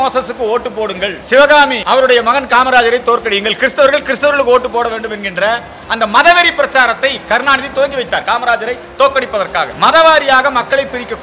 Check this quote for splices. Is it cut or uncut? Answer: cut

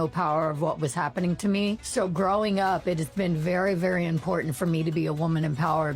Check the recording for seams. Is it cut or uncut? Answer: cut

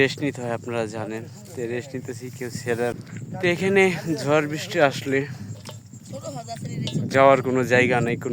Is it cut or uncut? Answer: cut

